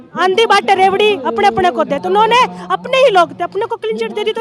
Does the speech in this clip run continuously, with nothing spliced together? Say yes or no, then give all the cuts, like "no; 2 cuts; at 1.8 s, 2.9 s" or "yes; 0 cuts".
yes; 0 cuts